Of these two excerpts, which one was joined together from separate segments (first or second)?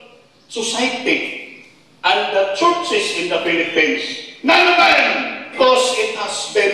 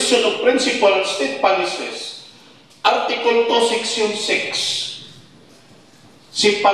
first